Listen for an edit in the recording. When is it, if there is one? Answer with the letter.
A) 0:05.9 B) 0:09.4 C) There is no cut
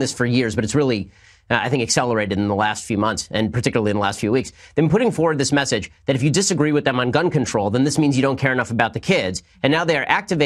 B